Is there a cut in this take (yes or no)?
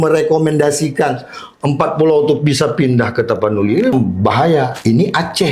yes